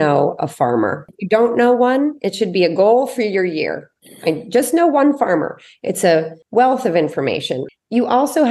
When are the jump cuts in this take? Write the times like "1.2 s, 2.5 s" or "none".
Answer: 1.1 s, 6.4 s, 7.6 s

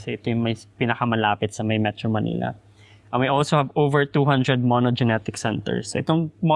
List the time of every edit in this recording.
none

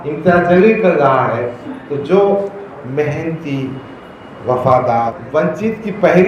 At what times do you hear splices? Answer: 5.2 s

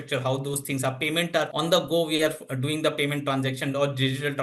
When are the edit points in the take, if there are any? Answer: 1.5 s

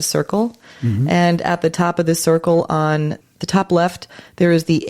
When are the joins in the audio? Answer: 3.3 s

